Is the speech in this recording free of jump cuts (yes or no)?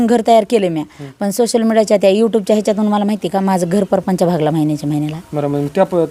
yes